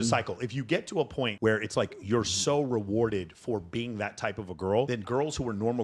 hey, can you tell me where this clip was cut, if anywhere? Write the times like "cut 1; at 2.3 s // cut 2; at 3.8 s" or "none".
cut 1; at 1.3 s // cut 2; at 5.0 s